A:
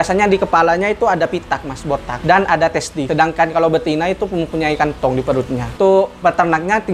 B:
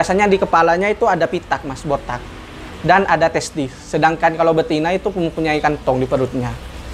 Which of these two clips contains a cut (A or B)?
A